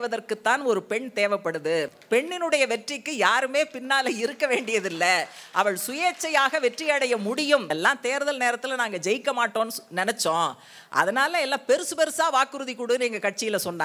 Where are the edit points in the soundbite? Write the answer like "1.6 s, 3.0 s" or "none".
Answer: 2.0 s, 7.7 s